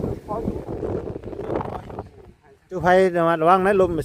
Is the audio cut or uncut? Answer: cut